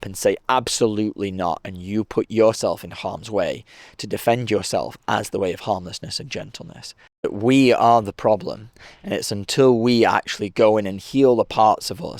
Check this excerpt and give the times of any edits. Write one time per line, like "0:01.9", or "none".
0:07.3